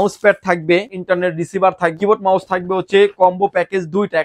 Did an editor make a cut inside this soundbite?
yes; 2 cuts; at 0.9 s, 1.9 s

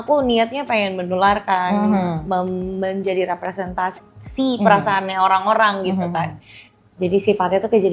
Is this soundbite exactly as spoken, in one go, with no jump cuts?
yes; 0 cuts

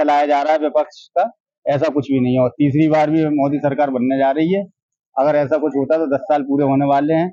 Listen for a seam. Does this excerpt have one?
no; 0 cuts

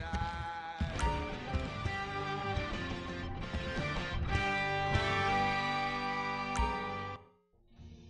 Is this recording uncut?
no; 1 cut; at 7.2 s

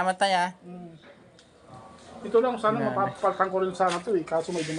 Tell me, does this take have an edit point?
no; 0 cuts

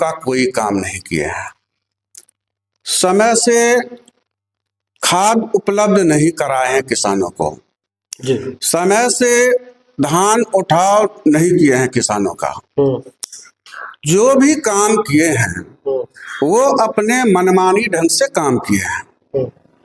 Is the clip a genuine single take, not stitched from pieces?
yes; 0 cuts

